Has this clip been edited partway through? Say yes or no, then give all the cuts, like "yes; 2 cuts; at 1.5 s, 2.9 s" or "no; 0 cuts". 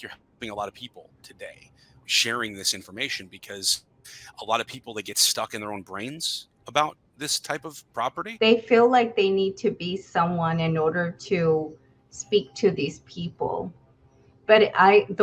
yes; 2 cuts; at 2.0 s, 8.2 s